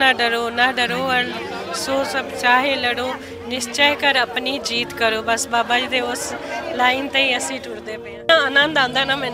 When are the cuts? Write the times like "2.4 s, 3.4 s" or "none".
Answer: 8.3 s